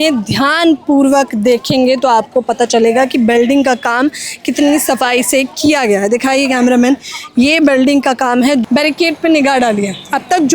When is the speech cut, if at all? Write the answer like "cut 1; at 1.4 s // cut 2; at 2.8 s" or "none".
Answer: cut 1; at 8.6 s